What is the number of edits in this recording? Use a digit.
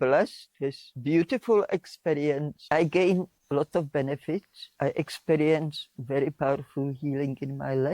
3